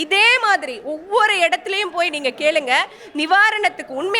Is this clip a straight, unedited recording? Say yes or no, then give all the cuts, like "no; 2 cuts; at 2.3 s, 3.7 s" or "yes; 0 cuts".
yes; 0 cuts